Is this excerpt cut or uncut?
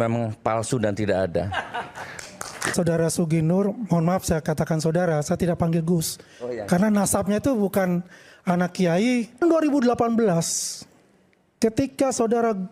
cut